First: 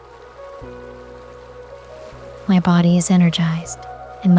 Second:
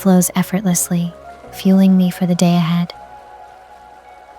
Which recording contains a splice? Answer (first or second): second